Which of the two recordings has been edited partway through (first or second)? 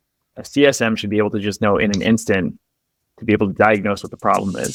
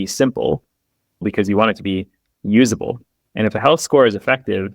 second